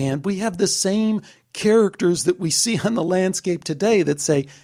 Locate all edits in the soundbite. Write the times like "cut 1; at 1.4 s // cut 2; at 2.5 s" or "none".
none